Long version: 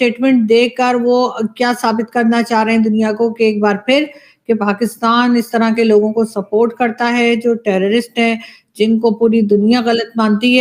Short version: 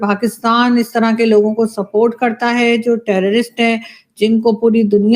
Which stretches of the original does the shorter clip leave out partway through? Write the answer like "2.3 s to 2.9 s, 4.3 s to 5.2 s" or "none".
none